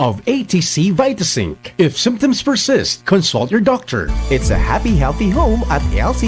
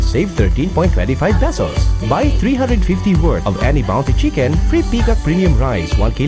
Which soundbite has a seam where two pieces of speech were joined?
first; 1 cut; at 4.0 s

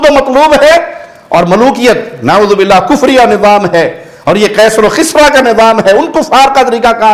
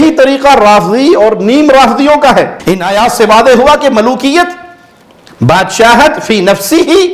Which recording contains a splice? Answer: second; 1 cut; at 2.6 s

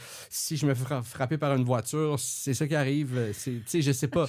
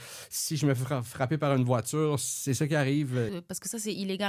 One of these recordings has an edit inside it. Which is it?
second; 1 cut; at 3.4 s

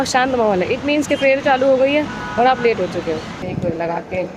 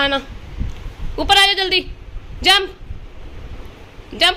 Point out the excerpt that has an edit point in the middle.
first; 1 cut; at 3.4 s

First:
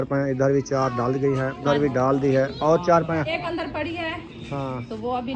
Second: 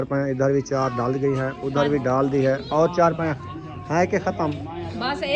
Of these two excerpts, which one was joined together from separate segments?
first; 2 cuts; at 1.6 s, 3.4 s

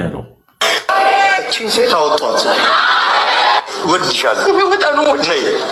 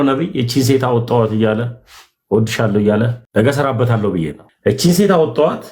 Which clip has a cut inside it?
second; 2 cuts; at 3.2 s, 4.4 s

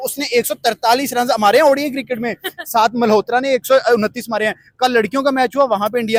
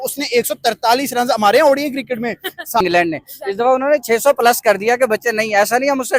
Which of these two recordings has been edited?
second; 1 cut; at 2.8 s

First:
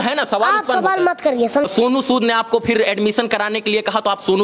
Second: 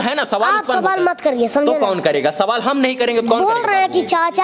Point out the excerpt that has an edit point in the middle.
first; 1 cut; at 1.6 s

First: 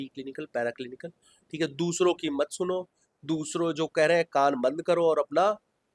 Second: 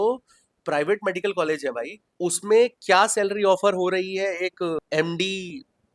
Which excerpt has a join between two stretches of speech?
second; 2 cuts; at 2.0 s, 4.8 s

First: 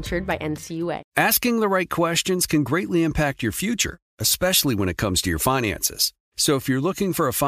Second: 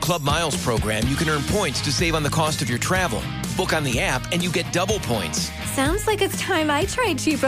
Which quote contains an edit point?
first; 1 cut; at 1.0 s

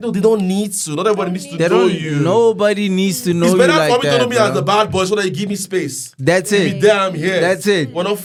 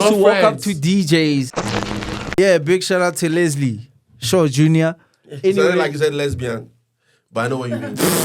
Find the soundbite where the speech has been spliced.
second; 1 cut; at 1.9 s

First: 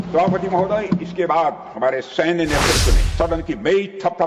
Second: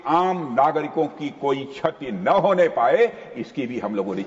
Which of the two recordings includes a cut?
first; 1 cut; at 3.1 s

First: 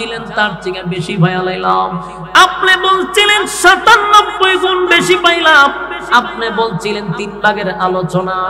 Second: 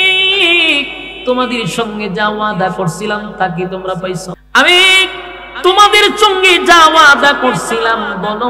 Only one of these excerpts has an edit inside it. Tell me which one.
second; 1 cut; at 4.4 s

